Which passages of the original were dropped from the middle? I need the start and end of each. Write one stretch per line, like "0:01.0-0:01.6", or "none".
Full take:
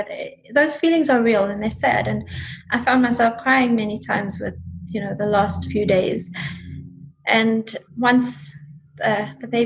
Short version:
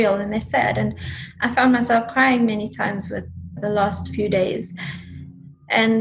0:04.7-0:05.0